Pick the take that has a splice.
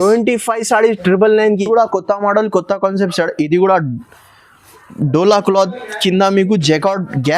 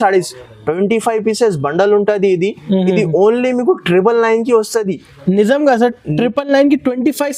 first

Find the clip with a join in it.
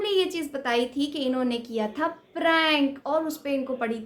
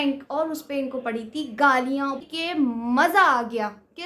second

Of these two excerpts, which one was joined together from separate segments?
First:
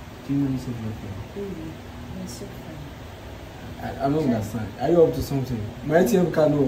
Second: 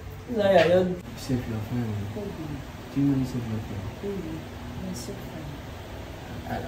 second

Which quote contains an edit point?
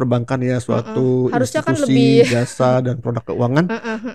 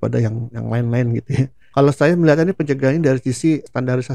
second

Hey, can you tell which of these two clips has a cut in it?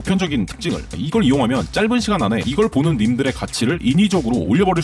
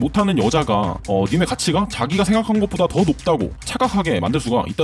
first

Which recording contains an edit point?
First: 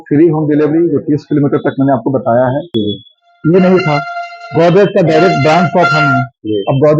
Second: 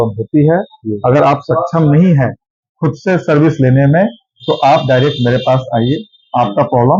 first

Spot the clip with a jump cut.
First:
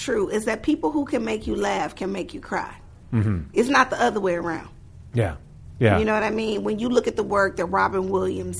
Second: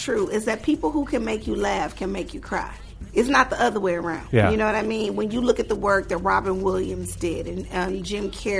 second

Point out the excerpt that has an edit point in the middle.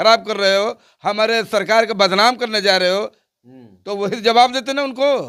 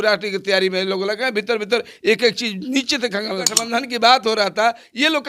second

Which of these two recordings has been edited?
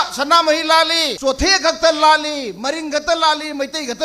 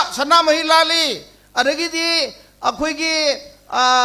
first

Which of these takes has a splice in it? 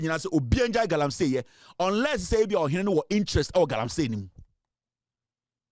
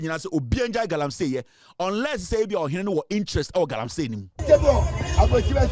second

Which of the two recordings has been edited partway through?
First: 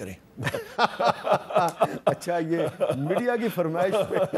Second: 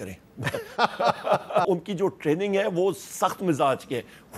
second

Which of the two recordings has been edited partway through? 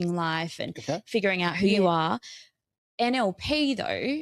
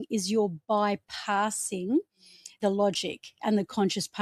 second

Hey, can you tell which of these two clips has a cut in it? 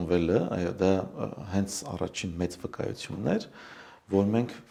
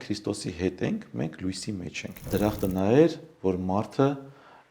second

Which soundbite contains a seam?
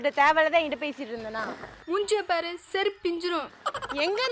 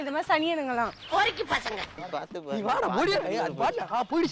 second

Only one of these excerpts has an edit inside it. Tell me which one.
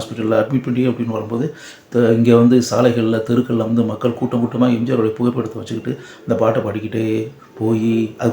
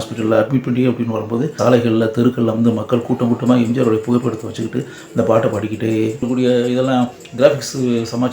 second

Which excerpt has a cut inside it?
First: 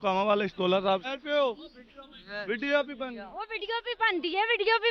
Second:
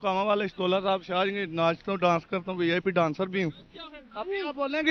first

